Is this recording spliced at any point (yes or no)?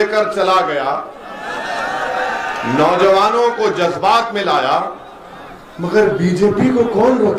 no